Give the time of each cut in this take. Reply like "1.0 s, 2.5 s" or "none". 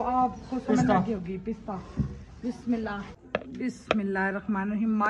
3.2 s